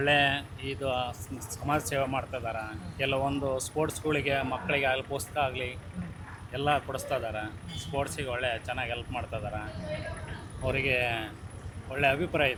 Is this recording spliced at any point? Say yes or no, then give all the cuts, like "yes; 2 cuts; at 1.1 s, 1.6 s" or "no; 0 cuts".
no; 0 cuts